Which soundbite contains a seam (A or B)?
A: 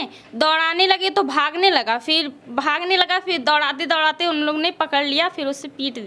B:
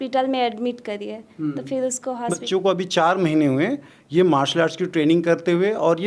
B